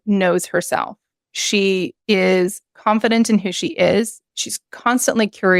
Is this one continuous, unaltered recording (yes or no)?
yes